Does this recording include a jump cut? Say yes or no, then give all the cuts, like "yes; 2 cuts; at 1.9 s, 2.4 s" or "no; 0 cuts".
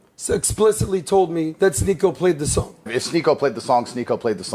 yes; 1 cut; at 1.5 s